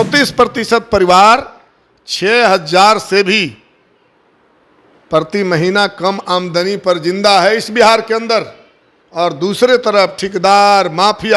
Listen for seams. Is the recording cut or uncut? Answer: uncut